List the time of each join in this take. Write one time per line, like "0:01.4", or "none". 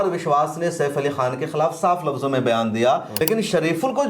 0:03.1